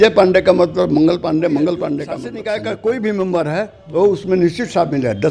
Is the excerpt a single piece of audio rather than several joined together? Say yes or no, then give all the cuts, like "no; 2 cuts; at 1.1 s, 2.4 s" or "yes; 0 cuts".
no; 1 cut; at 2.3 s